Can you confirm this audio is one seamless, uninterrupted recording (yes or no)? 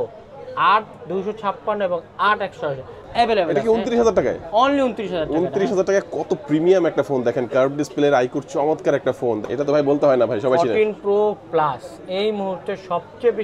no